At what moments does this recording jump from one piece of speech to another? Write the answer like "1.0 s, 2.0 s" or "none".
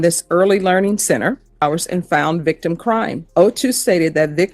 1.6 s, 3.2 s